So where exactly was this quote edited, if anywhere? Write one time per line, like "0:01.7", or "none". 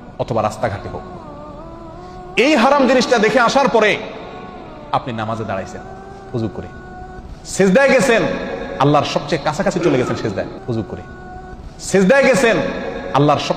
0:10.5